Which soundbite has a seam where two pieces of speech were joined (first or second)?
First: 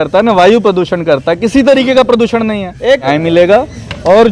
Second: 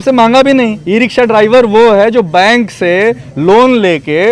first